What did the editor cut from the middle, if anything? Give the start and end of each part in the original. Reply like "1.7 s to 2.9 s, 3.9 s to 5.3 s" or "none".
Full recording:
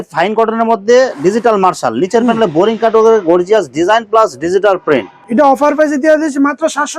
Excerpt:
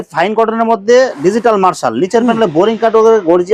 none